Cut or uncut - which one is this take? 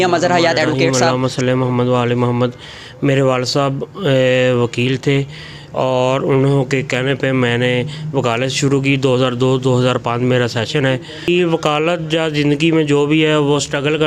cut